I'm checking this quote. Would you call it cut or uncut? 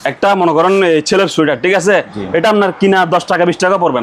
uncut